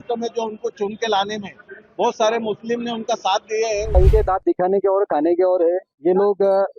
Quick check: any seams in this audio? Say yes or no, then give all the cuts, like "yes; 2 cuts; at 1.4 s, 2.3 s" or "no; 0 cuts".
yes; 1 cut; at 4.0 s